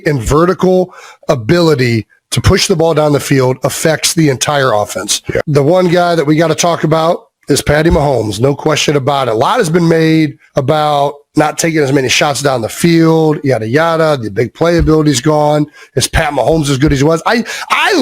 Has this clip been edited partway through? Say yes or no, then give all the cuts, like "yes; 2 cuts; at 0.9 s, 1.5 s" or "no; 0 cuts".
yes; 1 cut; at 5.4 s